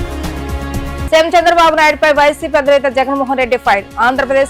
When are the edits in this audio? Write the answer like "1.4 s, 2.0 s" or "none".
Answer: none